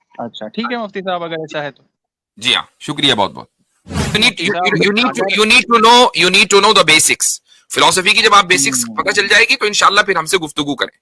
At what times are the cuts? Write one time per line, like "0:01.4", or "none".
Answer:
0:04.1